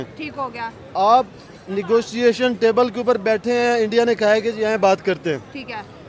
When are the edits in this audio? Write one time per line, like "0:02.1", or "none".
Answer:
none